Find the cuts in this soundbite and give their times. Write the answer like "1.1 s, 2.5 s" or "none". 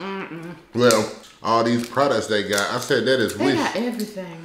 1.3 s